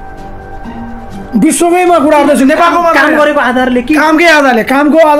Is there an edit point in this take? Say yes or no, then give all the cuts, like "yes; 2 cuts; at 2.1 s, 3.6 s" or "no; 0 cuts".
no; 0 cuts